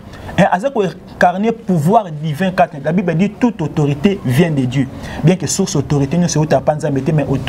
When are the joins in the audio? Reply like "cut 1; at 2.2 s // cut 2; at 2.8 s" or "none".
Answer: none